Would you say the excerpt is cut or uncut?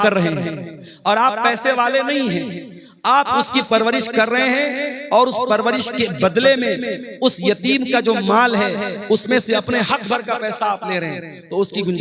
uncut